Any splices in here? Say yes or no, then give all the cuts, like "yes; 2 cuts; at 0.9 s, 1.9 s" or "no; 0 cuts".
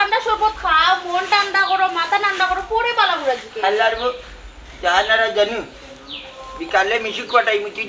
no; 0 cuts